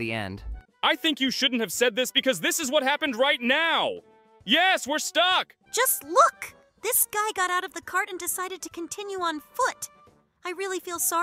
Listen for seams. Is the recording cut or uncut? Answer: cut